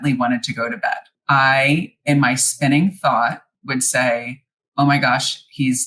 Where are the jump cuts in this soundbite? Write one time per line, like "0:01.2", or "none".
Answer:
0:01.1
0:03.5